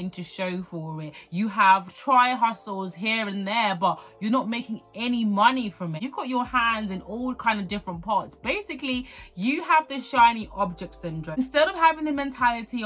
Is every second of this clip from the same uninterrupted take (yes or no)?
no